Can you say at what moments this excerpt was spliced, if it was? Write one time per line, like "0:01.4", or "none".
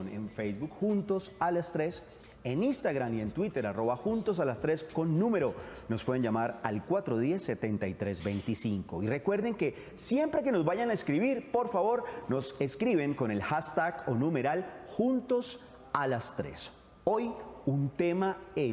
0:08.3